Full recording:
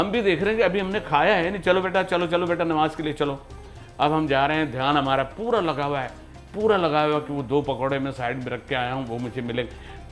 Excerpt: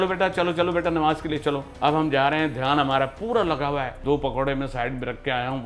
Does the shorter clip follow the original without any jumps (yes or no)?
no